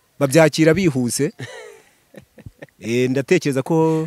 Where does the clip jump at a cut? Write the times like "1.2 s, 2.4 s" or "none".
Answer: none